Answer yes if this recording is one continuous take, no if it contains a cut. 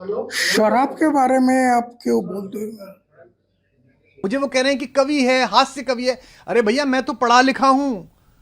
no